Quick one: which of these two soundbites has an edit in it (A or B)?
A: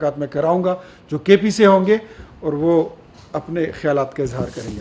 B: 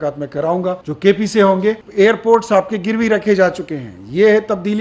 B